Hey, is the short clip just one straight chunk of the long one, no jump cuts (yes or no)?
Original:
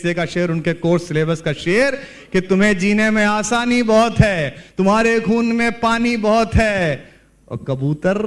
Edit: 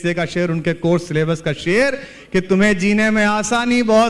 yes